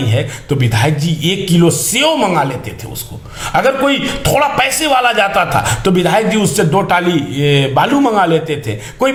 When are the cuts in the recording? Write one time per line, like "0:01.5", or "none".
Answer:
none